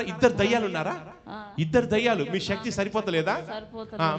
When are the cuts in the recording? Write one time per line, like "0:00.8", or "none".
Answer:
none